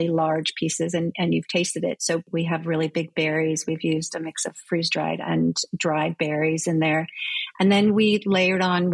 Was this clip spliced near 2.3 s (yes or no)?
yes